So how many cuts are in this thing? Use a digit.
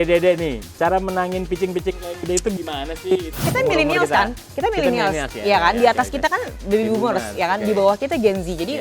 1